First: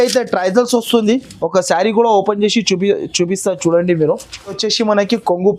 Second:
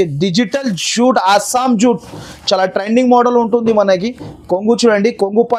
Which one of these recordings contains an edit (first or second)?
first